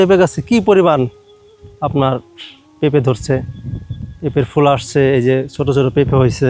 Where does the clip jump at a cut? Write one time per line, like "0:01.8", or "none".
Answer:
none